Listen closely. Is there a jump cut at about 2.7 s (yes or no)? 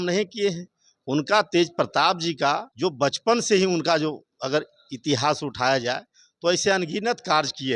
yes